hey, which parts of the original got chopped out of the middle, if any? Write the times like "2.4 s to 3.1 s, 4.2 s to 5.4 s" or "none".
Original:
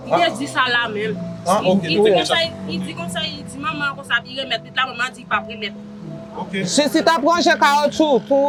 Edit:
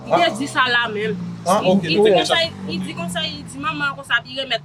none